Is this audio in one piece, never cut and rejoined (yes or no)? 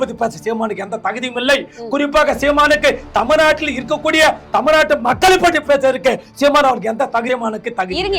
no